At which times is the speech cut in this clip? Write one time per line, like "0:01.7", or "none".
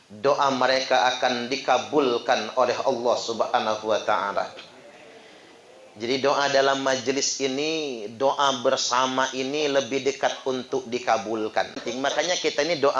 0:11.8